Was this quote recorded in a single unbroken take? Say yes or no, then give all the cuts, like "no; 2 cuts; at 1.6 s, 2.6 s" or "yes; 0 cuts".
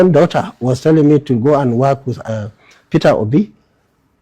no; 1 cut; at 2.4 s